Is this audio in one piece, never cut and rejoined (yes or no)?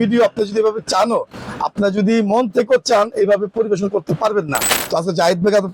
no